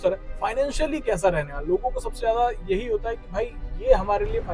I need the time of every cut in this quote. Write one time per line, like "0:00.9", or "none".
none